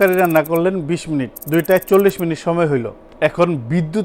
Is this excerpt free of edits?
no; 1 cut; at 3.0 s

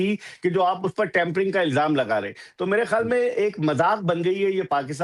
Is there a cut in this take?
no; 0 cuts

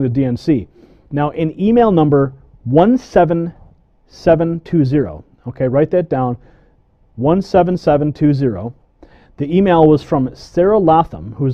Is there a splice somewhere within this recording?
yes; 1 cut; at 7.0 s

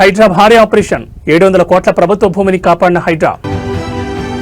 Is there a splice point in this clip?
yes; 1 cut; at 3.4 s

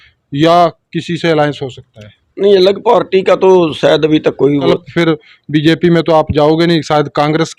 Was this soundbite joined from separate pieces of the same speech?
yes; 1 cut; at 4.8 s

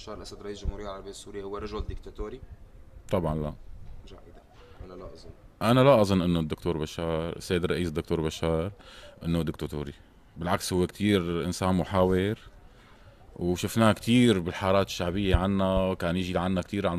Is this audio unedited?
no; 1 cut; at 2.5 s

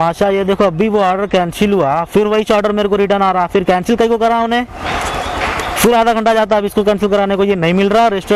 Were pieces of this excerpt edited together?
no; 0 cuts

